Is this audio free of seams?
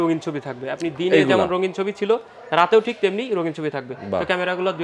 yes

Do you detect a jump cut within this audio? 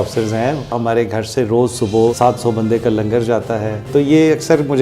yes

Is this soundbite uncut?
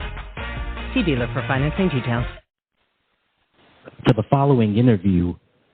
yes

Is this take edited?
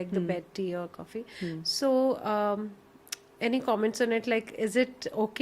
no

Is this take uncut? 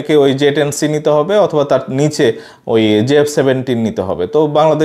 yes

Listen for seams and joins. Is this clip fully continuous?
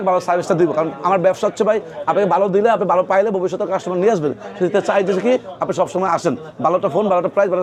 yes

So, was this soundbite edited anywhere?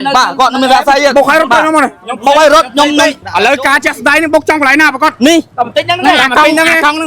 yes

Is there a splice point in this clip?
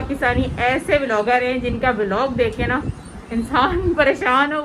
no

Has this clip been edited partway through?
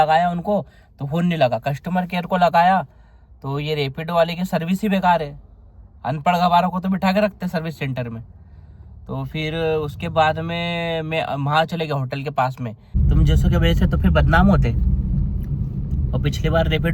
yes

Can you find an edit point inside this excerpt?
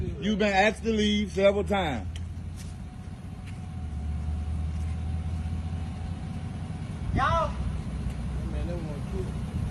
no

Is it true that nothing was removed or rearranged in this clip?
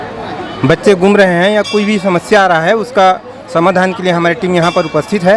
yes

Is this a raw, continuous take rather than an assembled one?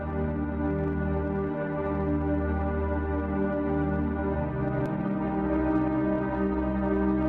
yes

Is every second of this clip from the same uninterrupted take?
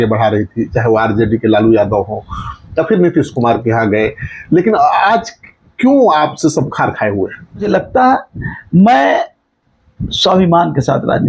no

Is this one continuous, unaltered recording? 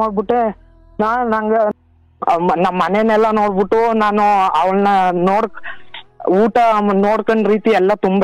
no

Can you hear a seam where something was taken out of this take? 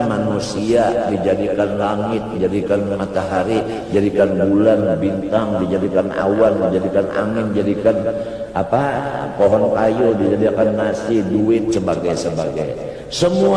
no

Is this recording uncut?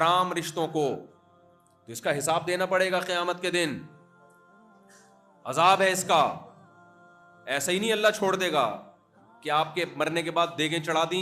yes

